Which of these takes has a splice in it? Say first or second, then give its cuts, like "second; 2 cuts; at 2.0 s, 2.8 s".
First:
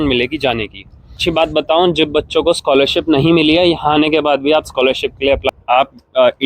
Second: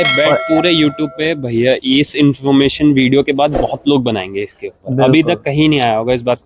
first; 2 cuts; at 1.2 s, 5.6 s